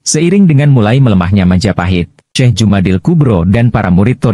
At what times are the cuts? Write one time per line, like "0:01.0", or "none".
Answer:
0:02.3